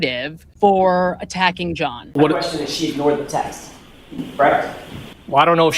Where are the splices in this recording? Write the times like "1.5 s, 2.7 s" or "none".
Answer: 2.1 s